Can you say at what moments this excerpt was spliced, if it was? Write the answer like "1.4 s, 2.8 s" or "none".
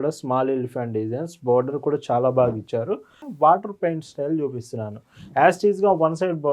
3.2 s